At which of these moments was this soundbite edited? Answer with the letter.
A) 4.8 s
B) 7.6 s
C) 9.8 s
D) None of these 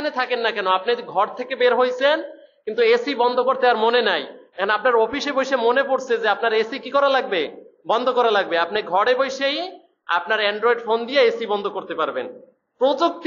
D